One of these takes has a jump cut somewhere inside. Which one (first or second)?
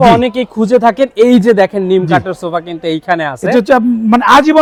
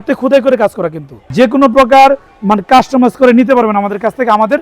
second